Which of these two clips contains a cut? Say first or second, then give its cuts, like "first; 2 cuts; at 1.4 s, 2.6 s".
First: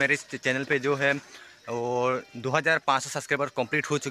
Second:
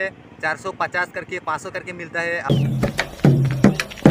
second; 1 cut; at 2.5 s